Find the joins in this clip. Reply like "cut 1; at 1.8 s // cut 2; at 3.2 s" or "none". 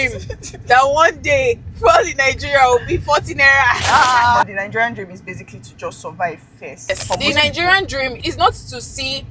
cut 1; at 4.6 s // cut 2; at 6.9 s // cut 3; at 8.2 s